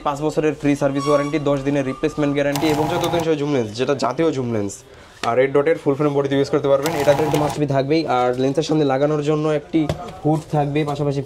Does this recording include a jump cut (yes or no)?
yes